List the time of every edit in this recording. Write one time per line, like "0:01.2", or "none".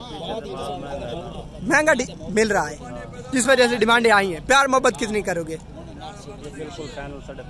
none